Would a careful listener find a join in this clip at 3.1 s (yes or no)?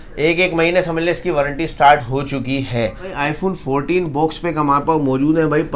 yes